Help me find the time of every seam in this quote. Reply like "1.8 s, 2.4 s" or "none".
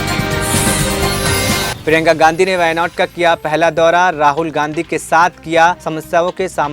1.7 s